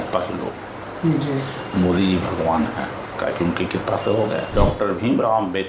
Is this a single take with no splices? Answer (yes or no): no